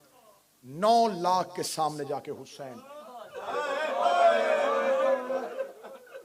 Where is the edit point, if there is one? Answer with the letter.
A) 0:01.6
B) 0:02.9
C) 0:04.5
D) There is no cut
D